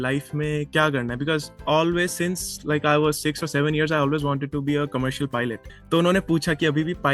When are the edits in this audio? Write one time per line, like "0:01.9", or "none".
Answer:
0:05.7